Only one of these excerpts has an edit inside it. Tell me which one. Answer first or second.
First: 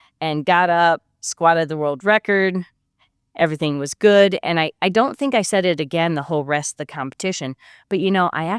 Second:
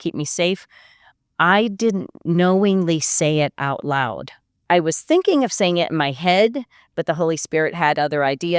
second